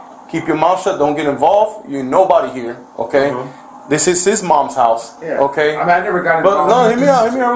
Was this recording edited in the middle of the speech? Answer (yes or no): no